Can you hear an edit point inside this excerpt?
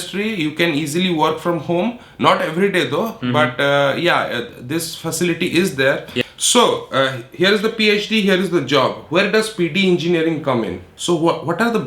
yes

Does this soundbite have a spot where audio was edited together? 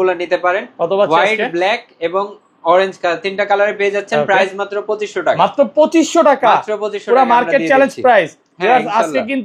no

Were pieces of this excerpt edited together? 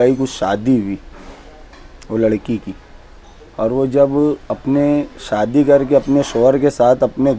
no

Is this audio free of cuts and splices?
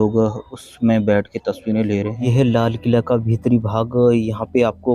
no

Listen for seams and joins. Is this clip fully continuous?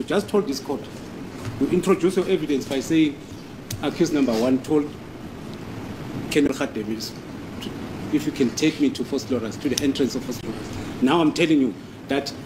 yes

